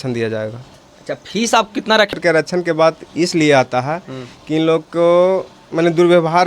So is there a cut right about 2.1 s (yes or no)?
yes